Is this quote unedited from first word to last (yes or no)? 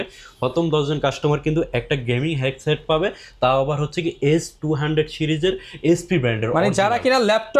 yes